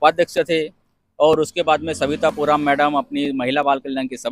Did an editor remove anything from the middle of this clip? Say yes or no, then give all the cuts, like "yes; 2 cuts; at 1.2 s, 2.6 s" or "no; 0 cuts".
no; 0 cuts